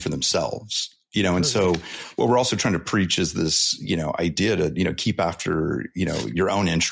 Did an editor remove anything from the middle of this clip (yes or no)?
no